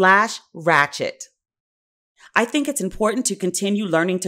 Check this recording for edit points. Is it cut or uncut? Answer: uncut